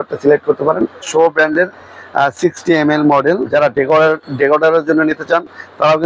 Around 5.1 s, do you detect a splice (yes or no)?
no